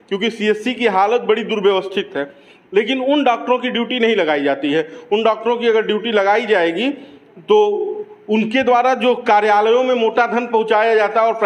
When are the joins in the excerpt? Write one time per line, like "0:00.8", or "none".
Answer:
none